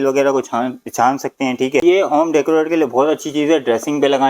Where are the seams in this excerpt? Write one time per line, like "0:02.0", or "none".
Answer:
0:01.8

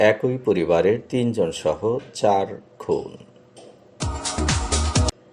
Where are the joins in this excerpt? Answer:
none

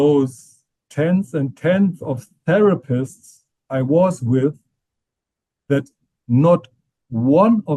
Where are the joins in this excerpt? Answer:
none

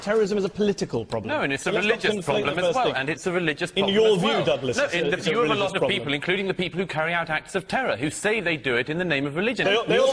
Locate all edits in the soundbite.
0:01.2

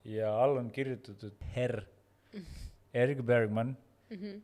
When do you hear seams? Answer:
0:01.3

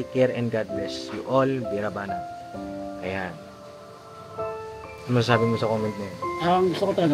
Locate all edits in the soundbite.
none

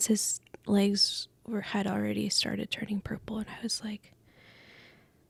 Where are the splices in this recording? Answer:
none

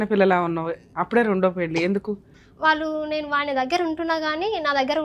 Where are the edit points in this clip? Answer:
0:02.3

